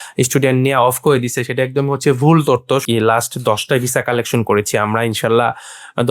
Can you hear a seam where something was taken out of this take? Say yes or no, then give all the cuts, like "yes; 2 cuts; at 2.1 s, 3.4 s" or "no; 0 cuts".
yes; 1 cut; at 2.8 s